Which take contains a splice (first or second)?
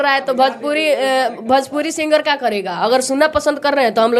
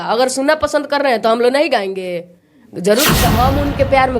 second